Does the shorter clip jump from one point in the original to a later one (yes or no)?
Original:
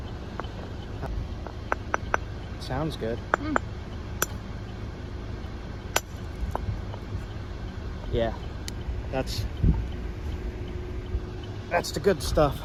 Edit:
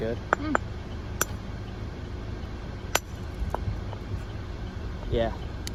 no